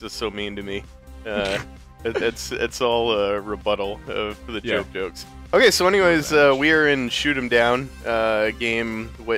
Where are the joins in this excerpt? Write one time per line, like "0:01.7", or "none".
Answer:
0:01.3